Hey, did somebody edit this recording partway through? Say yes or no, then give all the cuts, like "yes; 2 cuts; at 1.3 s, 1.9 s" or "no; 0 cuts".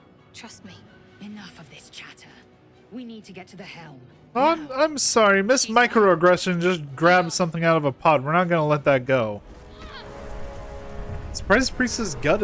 yes; 1 cut; at 9.8 s